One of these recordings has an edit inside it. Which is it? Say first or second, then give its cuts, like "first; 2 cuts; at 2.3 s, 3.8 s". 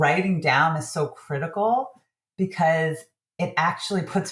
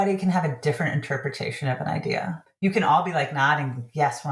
second; 1 cut; at 2.5 s